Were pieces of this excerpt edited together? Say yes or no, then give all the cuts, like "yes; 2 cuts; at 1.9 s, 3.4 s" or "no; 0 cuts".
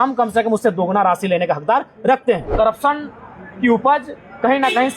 yes; 1 cut; at 2.5 s